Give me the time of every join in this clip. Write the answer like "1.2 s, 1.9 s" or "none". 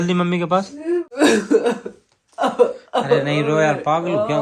1.2 s